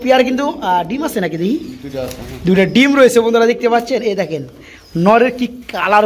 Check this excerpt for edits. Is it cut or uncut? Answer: uncut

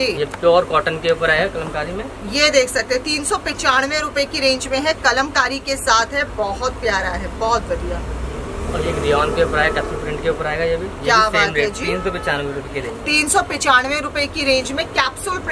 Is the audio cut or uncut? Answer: uncut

